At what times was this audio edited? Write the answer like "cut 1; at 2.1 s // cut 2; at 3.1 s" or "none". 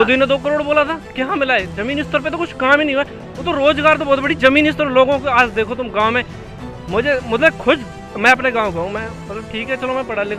none